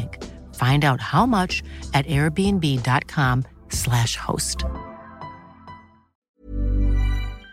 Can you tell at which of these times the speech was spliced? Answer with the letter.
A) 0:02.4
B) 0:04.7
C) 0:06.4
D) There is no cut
C